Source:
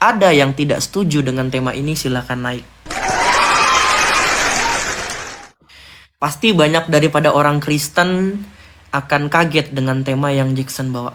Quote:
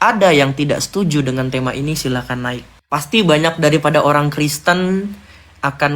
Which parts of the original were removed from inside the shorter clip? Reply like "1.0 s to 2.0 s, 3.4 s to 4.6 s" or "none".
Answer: 2.7 s to 6.0 s